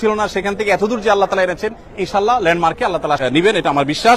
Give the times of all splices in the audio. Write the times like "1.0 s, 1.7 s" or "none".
3.2 s